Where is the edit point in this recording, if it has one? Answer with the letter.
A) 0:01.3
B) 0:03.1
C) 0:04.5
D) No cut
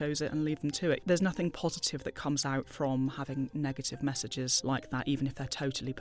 C